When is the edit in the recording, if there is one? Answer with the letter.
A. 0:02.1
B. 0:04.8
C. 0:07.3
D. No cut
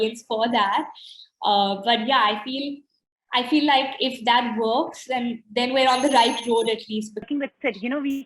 C